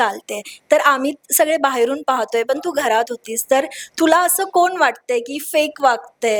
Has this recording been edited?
no; 0 cuts

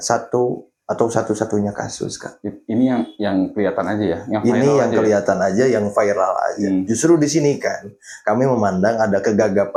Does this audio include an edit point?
no; 0 cuts

